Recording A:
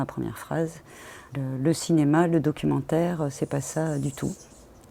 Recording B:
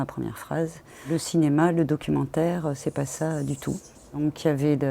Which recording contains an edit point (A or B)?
B